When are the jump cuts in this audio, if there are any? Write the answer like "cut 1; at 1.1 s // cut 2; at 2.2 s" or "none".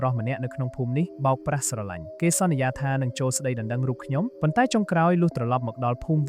cut 1; at 1.1 s // cut 2; at 2.0 s // cut 3; at 4.3 s